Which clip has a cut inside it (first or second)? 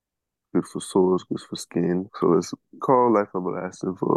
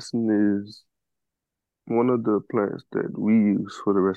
first